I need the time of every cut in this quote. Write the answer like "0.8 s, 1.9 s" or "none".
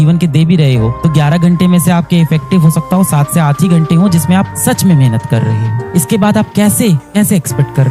none